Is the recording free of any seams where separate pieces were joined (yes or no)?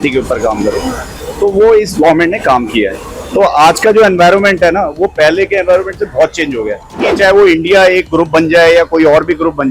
no